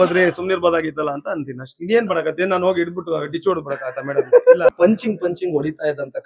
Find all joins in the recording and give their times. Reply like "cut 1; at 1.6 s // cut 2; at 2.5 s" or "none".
cut 1; at 4.7 s

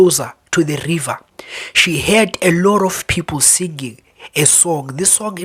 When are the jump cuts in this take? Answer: none

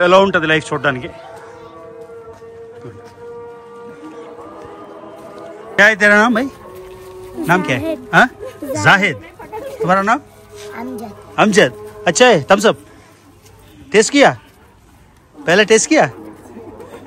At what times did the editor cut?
cut 1; at 5.8 s

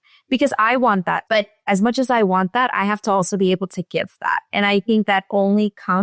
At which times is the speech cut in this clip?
cut 1; at 1.2 s

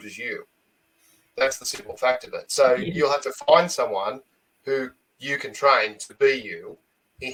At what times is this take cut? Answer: none

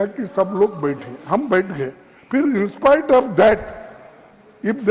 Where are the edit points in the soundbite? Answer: none

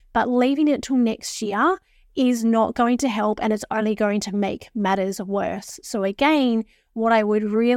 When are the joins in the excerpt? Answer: none

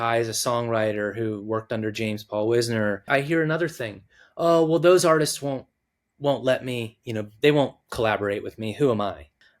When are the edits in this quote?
cut 1; at 3.1 s

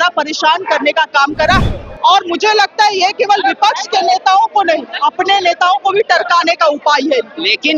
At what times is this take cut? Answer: cut 1; at 1.6 s

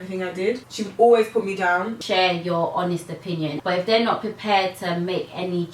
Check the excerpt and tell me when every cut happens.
cut 1; at 2.0 s // cut 2; at 3.6 s

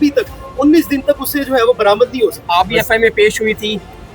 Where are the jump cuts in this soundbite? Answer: cut 1; at 2.4 s

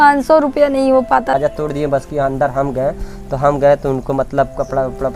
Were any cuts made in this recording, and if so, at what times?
cut 1; at 1.3 s

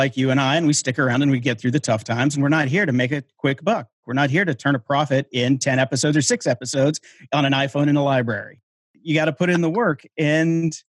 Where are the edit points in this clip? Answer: cut 1; at 1.1 s // cut 2; at 8.7 s

